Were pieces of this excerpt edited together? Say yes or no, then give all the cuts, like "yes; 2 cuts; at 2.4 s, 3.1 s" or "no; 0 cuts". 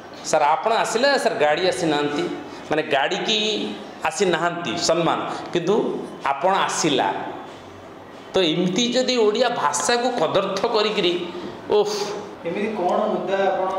yes; 1 cut; at 12.4 s